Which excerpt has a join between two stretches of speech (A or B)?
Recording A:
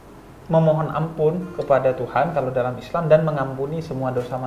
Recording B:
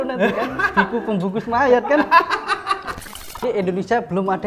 B